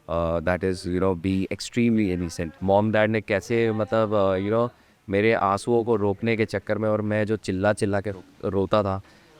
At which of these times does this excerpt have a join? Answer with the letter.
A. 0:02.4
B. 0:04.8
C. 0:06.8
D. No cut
A